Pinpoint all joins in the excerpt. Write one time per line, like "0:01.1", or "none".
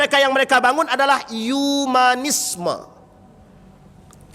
none